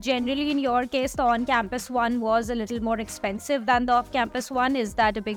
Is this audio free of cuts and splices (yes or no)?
yes